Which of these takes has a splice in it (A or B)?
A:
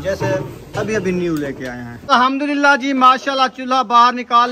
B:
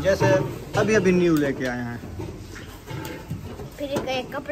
A